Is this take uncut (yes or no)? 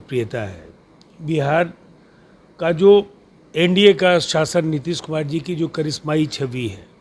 yes